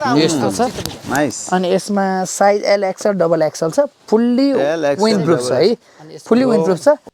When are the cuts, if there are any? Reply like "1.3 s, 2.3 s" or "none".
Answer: none